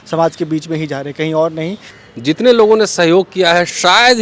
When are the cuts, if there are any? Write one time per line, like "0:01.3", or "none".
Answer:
0:01.9